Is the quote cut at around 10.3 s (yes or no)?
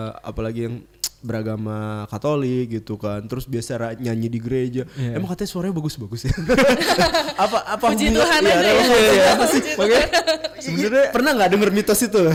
no